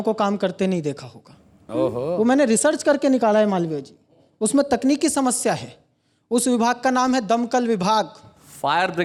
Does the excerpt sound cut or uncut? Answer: uncut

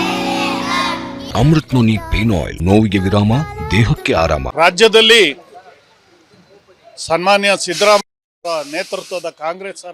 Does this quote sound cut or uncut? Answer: cut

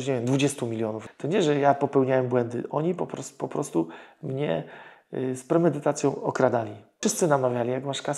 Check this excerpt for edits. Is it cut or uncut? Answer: cut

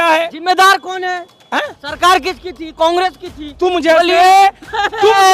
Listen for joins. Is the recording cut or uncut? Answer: uncut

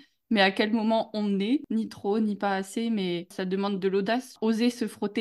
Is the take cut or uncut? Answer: cut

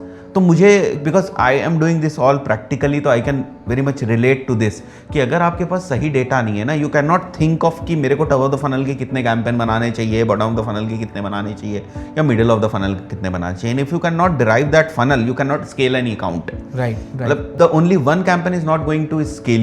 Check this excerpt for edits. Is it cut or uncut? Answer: cut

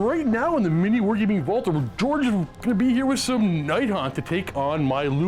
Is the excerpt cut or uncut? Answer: uncut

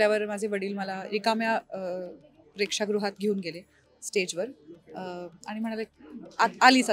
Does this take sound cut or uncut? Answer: uncut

